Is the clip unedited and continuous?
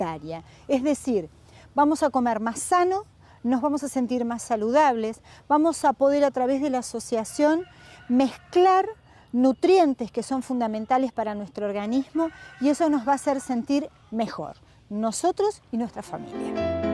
yes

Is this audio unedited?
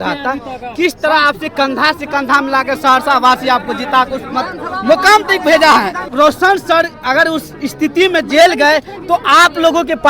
no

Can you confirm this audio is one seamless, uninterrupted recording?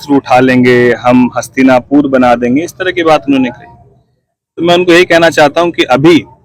yes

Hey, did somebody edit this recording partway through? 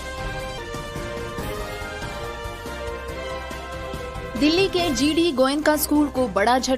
yes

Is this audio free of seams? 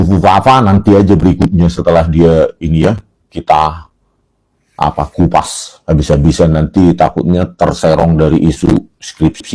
yes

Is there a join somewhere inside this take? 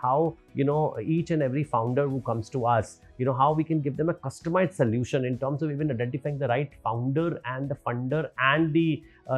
no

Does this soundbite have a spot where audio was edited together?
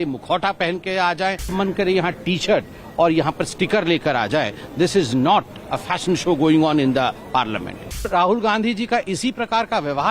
yes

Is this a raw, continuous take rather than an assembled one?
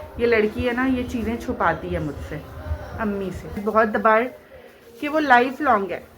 no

